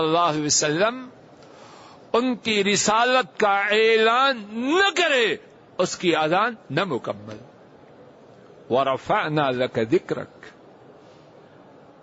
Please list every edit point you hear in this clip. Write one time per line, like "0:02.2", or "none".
none